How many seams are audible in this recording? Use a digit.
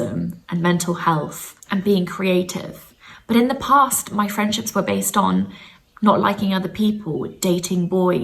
1